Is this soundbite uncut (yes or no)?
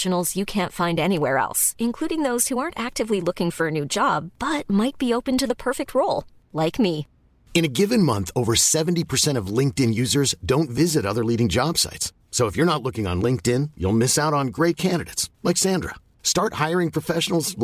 yes